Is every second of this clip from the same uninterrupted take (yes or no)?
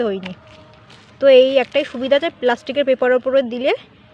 yes